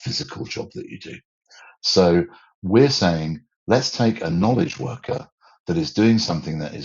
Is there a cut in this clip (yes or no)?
no